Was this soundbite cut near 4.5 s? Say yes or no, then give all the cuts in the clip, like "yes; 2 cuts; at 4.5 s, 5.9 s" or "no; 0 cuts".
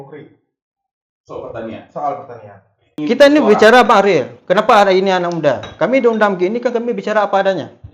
no; 1 cut; at 3.0 s